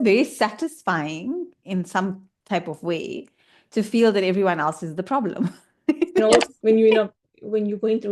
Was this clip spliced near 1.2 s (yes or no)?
no